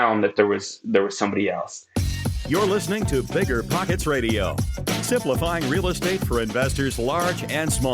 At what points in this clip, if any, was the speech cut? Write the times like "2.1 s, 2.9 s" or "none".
1.8 s